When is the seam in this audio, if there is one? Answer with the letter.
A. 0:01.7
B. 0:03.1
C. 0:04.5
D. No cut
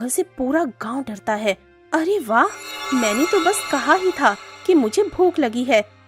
A